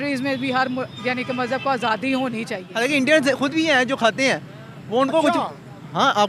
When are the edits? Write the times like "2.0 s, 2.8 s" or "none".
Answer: 2.6 s